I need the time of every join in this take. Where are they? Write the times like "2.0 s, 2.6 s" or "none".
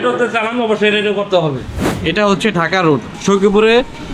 1.8 s